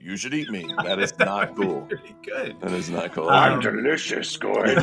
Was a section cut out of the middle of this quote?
no; 0 cuts

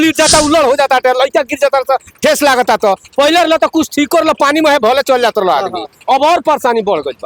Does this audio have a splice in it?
no; 0 cuts

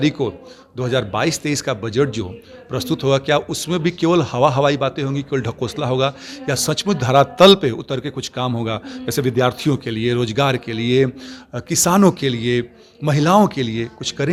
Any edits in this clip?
no; 0 cuts

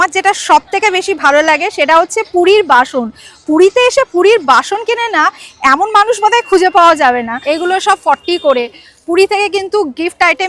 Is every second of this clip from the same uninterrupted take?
no; 1 cut; at 7.3 s

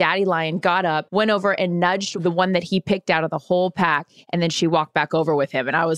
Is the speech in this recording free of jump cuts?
no; 2 cuts; at 1.0 s, 2.1 s

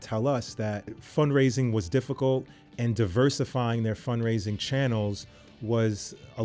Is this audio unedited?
no; 1 cut; at 1.0 s

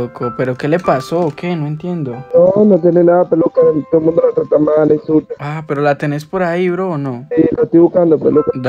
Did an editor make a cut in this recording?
no; 0 cuts

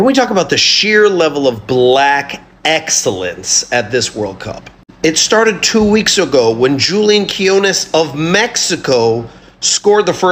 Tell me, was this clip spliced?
no; 0 cuts

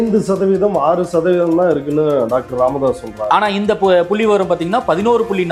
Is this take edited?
no; 0 cuts

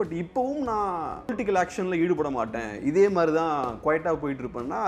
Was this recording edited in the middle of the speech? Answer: yes; 1 cut; at 1.3 s

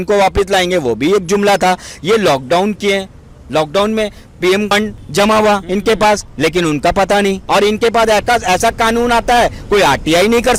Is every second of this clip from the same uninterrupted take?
yes; 0 cuts

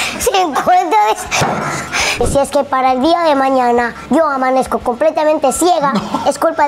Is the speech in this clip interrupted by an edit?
yes; 2 cuts; at 2.2 s, 4.0 s

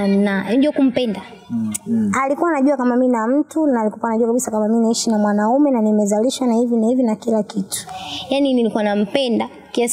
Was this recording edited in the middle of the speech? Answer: yes; 2 cuts; at 1.8 s, 7.8 s

